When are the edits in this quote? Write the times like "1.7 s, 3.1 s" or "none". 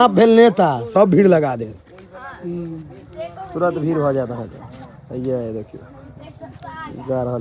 none